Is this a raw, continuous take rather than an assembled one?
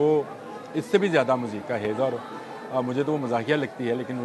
yes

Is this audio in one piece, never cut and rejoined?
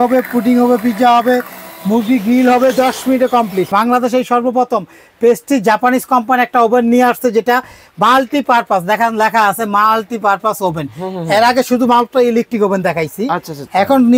no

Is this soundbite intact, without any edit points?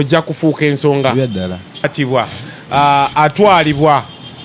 no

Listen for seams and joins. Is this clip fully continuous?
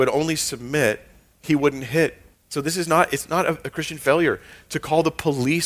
no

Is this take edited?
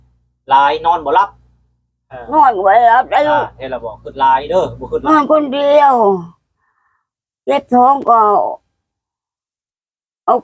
yes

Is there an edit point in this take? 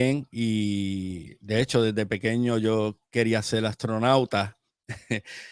no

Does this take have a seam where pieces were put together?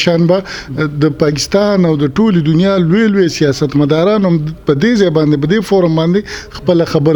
no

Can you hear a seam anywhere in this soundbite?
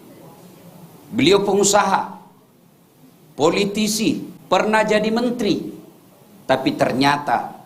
yes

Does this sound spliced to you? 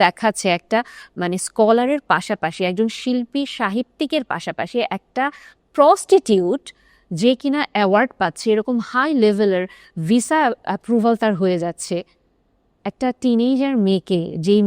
no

